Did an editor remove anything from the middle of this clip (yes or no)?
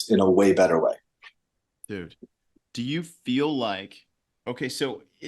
no